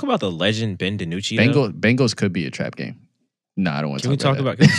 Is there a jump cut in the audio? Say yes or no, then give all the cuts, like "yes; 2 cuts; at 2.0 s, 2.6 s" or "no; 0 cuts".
no; 0 cuts